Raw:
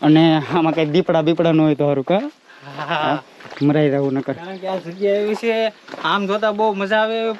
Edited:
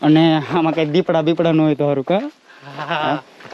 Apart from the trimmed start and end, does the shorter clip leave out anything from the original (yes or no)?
no